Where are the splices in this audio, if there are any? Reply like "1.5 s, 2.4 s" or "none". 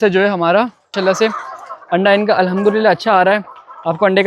0.9 s